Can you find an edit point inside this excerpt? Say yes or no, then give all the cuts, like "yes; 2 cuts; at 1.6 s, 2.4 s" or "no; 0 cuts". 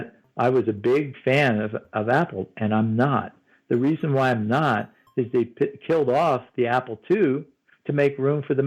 no; 0 cuts